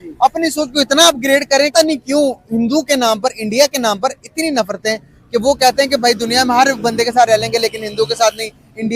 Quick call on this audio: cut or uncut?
uncut